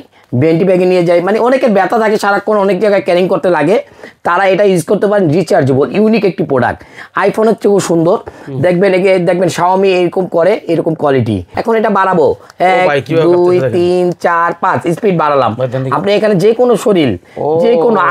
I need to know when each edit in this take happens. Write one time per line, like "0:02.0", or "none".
0:11.5